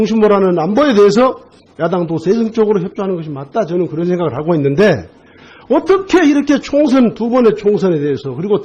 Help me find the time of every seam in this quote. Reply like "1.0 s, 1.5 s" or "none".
3.3 s